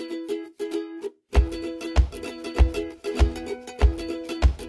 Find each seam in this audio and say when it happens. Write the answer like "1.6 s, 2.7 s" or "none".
1.2 s